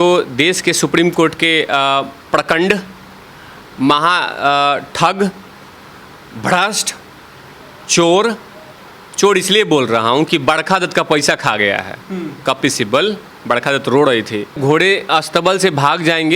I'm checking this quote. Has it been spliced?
yes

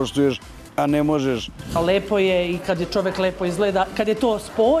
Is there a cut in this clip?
yes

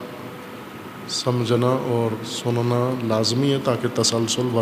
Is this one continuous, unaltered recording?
no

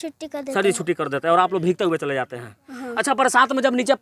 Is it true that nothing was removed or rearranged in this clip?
yes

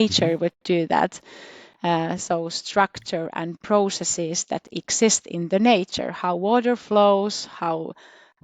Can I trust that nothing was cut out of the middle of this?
yes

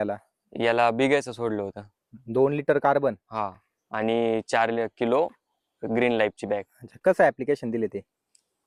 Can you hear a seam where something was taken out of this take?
no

